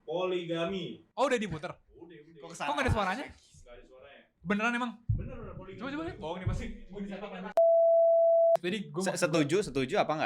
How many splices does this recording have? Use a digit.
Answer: 1